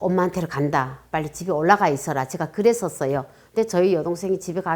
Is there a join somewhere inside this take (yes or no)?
no